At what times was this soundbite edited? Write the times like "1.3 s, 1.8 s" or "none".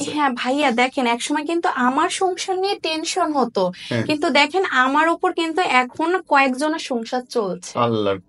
none